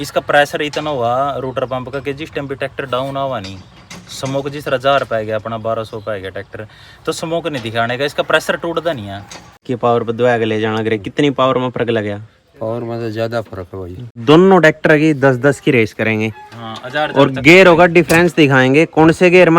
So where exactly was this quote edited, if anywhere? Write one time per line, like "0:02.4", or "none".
0:09.7
0:14.1